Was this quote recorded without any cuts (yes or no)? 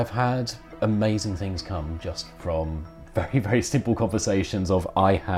yes